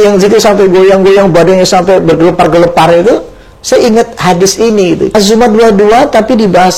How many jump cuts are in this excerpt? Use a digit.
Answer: 1